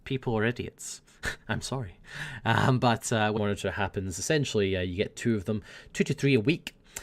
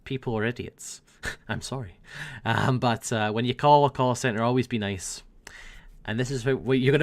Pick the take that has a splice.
second; 1 cut; at 3.3 s

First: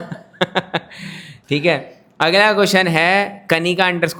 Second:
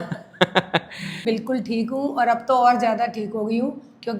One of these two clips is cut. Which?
second; 1 cut; at 1.2 s

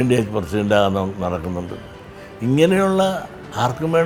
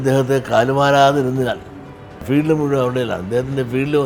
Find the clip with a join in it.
second; 1 cut; at 2.2 s

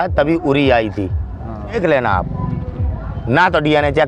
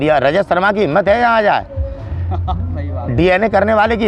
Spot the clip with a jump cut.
first; 1 cut; at 1.8 s

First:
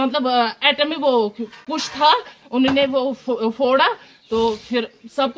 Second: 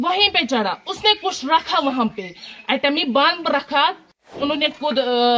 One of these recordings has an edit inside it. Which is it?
second; 1 cut; at 4.3 s

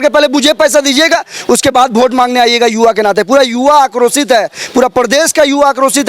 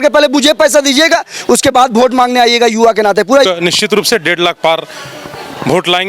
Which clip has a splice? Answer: second; 1 cut; at 3.5 s

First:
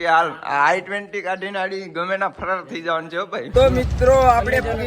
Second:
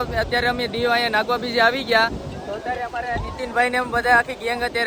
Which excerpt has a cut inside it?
first; 1 cut; at 3.5 s

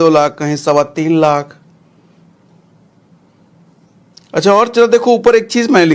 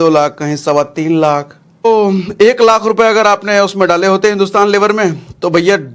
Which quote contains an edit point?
second; 1 cut; at 1.9 s

